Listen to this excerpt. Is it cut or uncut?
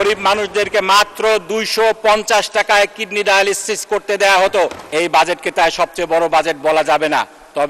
cut